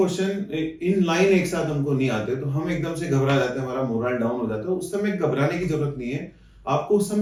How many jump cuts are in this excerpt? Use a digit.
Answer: 0